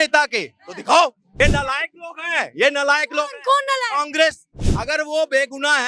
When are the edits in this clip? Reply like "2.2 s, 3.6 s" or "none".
1.4 s, 4.5 s

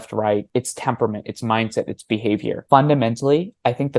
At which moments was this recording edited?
2.6 s

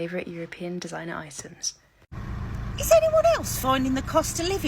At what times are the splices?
2.1 s

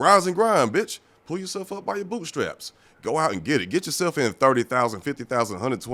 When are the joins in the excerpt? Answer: none

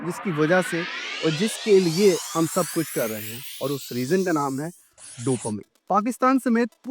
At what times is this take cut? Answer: 5.7 s

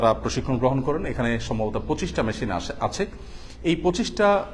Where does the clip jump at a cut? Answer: none

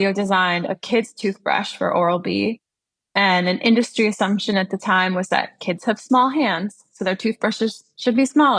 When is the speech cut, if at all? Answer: none

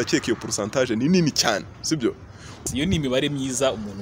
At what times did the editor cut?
2.6 s

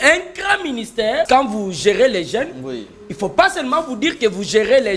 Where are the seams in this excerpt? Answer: 1.3 s

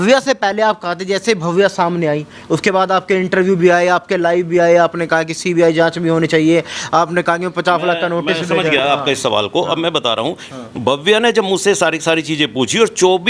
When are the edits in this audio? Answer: none

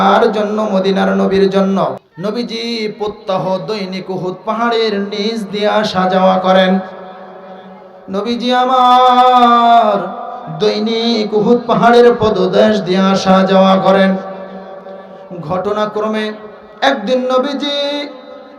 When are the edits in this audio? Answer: 2.1 s

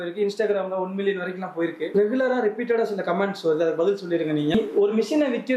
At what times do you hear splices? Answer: 1.9 s, 4.5 s

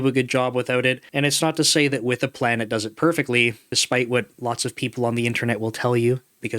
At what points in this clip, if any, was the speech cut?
1.1 s, 3.7 s

